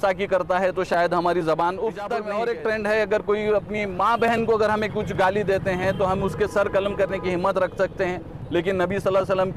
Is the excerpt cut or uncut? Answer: cut